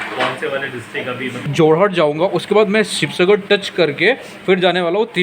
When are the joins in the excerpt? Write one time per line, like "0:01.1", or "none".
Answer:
0:01.4